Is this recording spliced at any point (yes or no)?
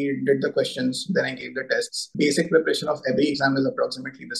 yes